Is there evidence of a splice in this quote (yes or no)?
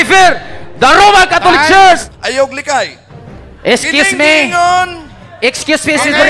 yes